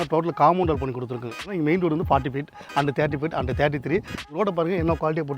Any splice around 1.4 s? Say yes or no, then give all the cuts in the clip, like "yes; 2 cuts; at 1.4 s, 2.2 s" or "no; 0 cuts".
yes; 2 cuts; at 1.4 s, 4.3 s